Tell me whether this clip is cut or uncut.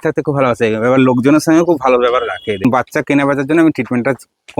cut